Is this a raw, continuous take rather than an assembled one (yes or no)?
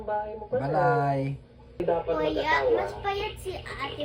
no